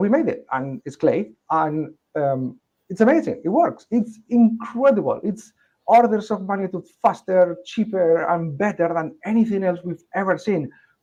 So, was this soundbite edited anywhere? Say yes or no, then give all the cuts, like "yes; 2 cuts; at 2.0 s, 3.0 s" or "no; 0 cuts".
no; 0 cuts